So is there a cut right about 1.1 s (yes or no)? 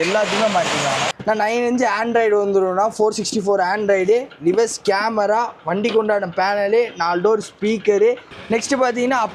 yes